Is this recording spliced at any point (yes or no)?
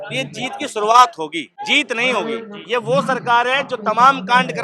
yes